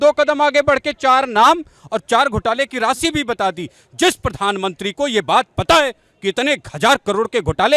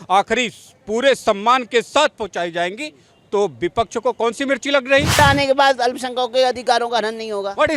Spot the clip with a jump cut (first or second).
second